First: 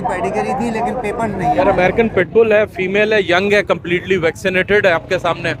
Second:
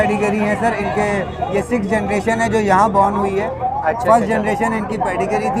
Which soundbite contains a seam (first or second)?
first